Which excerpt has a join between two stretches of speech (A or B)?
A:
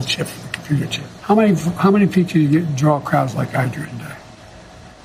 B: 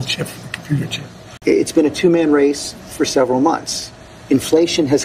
A